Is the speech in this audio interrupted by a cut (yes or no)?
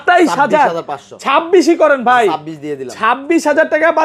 no